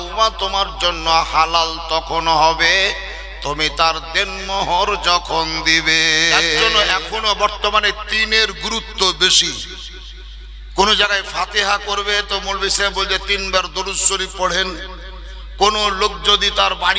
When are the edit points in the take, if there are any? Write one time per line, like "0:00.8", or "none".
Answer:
0:06.6

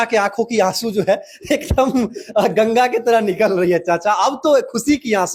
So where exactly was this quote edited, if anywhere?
none

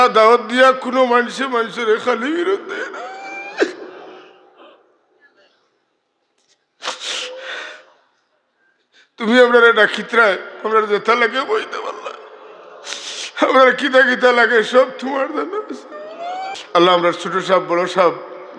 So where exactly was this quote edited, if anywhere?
0:16.6

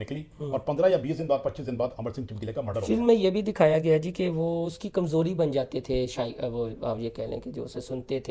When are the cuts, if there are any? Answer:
none

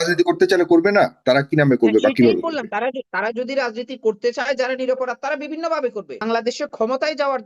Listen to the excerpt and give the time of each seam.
0:06.2

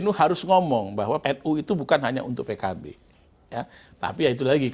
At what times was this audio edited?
0:01.2

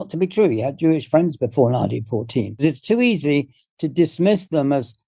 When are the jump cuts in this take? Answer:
0:02.6

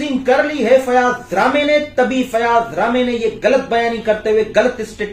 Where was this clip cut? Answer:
none

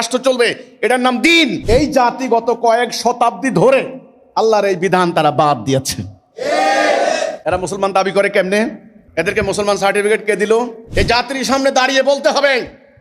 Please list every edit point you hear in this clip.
0:01.6
0:10.8

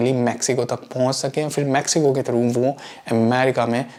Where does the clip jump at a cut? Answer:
none

